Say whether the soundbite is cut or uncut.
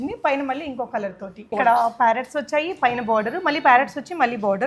cut